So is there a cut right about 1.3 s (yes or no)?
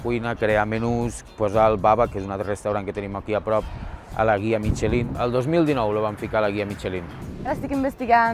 yes